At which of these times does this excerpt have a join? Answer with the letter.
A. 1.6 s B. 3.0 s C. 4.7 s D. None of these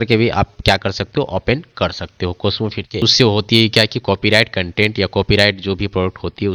B